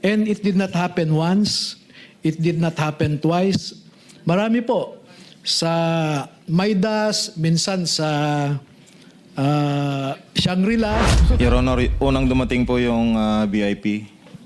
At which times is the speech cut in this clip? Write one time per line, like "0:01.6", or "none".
0:11.2